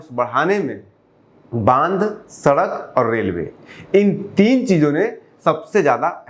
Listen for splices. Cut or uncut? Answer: uncut